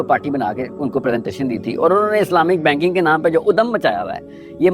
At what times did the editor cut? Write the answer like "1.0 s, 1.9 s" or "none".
none

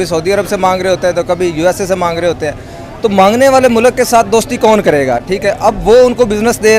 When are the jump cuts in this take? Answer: none

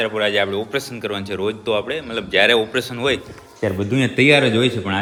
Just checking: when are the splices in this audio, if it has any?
none

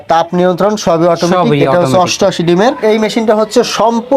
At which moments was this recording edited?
2.8 s

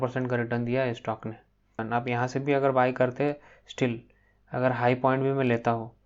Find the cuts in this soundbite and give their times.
1.8 s

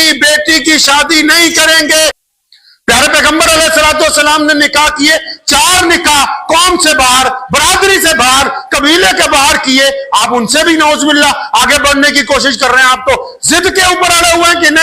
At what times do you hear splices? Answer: 2.2 s

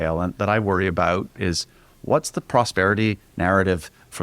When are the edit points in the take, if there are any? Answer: 1.3 s

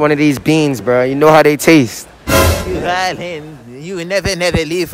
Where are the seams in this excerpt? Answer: 2.7 s

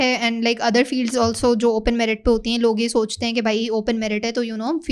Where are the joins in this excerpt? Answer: none

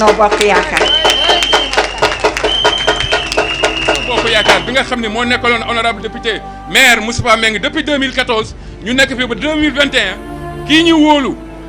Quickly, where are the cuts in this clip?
4.3 s

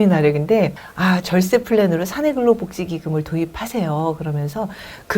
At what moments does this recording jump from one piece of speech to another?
none

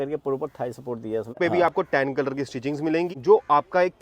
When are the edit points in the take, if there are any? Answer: 1.4 s, 3.1 s

